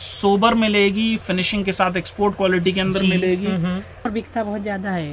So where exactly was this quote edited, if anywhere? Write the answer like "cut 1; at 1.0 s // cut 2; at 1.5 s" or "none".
cut 1; at 4.1 s